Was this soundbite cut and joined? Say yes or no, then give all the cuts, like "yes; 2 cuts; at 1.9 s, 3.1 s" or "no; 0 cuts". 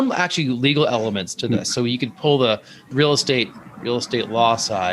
yes; 1 cut; at 2.9 s